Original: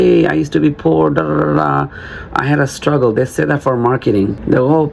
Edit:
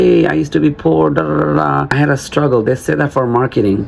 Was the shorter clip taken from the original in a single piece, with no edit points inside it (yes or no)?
no